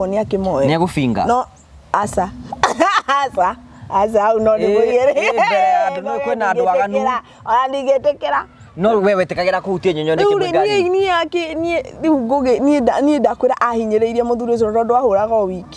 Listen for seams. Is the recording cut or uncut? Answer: uncut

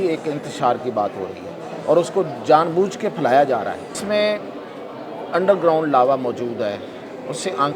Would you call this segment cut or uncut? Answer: cut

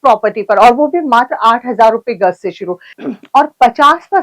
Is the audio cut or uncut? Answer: cut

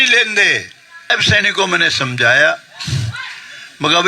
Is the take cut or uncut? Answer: cut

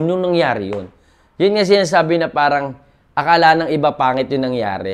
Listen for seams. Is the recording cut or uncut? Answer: uncut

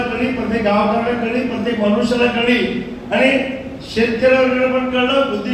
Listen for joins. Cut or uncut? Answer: uncut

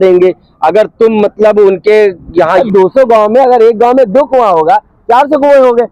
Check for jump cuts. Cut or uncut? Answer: cut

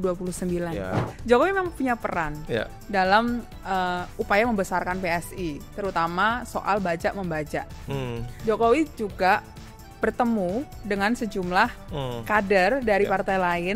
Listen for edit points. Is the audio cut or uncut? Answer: cut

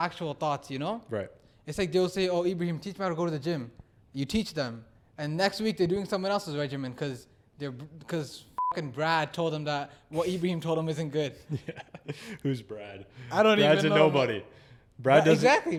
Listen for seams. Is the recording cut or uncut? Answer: uncut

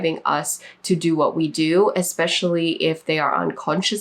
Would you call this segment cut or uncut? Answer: uncut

